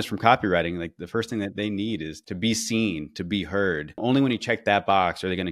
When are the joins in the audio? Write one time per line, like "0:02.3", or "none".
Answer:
0:01.0
0:02.1
0:04.0